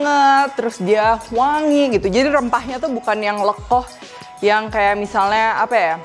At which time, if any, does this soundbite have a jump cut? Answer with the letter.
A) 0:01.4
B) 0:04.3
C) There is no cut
C